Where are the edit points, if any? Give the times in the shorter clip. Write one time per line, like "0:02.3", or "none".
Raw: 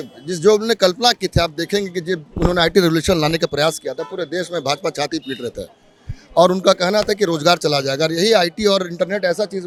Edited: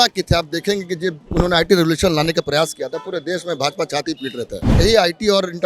0:04.8